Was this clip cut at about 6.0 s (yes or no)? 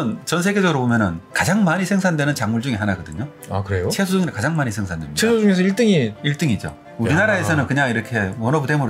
no